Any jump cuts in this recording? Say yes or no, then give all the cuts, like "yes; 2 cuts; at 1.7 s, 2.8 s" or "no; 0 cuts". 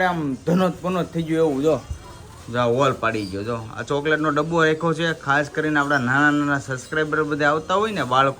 no; 0 cuts